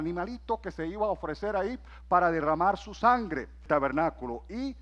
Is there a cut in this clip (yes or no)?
yes